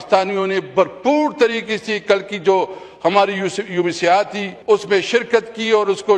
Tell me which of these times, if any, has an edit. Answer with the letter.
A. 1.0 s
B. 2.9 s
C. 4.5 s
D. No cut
C